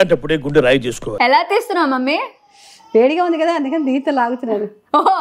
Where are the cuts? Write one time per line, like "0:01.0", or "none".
0:01.1